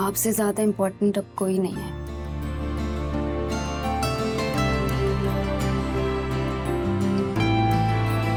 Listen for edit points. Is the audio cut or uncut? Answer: uncut